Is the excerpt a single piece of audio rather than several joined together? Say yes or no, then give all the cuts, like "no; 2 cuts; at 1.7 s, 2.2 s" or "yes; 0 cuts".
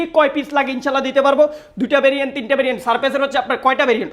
yes; 0 cuts